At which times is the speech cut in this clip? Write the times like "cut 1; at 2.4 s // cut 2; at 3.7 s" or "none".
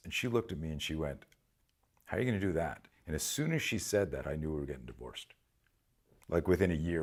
none